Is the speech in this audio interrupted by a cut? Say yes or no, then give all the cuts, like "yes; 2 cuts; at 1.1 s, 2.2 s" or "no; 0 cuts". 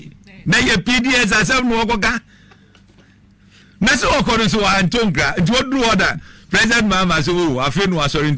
no; 0 cuts